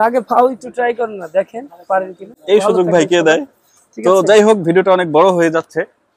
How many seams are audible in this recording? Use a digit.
0